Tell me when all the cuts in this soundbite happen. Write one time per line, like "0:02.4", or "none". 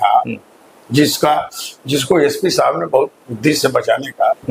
none